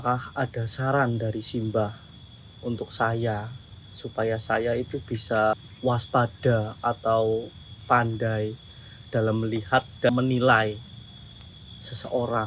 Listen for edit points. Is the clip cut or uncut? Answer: cut